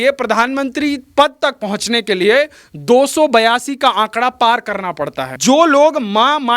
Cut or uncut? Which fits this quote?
cut